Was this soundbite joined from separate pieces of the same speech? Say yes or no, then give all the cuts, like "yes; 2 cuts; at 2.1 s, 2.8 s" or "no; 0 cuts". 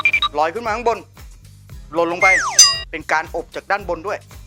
no; 0 cuts